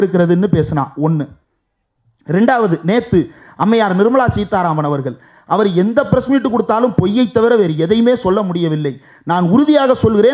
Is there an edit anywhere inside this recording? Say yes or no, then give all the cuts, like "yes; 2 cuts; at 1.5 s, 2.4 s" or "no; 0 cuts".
no; 0 cuts